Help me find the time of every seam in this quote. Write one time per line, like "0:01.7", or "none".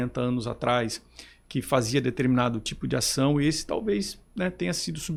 none

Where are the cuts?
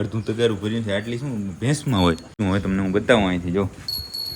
0:02.3

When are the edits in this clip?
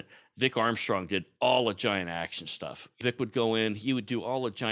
0:03.0

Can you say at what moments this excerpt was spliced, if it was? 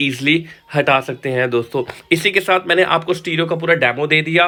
none

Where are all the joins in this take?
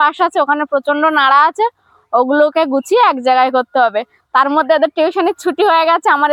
none

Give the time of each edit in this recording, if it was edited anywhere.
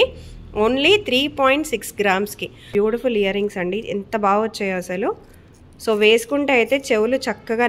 0:02.7

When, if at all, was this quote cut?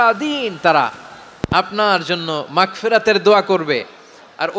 none

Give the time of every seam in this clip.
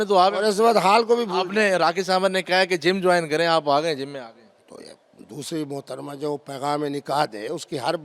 none

